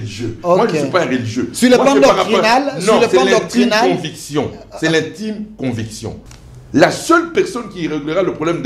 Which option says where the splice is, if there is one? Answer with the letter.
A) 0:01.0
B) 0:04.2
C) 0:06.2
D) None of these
C